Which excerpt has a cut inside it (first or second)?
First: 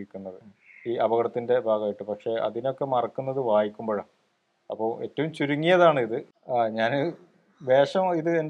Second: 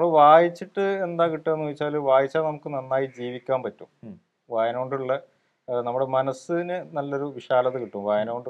first